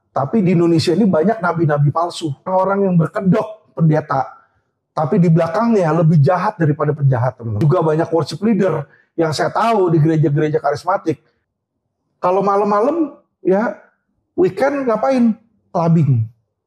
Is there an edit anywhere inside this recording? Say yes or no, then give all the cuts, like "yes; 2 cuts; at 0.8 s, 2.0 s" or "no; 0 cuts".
yes; 3 cuts; at 2.5 s, 7.6 s, 11.4 s